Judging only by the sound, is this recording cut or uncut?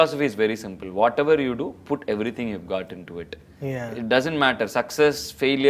uncut